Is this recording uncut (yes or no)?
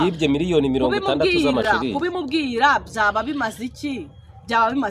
yes